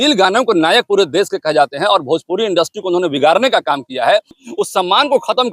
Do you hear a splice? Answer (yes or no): yes